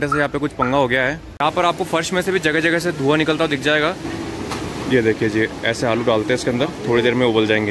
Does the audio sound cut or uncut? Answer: cut